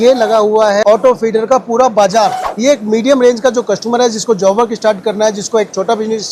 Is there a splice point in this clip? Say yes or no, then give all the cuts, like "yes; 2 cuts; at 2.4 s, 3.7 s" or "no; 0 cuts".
yes; 2 cuts; at 0.8 s, 2.4 s